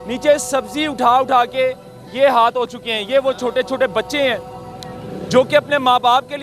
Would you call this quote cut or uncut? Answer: uncut